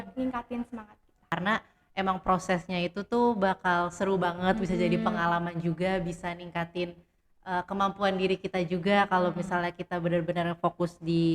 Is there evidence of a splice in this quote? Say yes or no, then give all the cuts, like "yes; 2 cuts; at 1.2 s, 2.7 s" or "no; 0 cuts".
yes; 1 cut; at 1.3 s